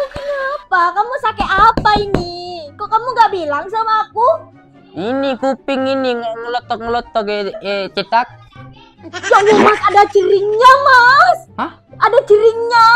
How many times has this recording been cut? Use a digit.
0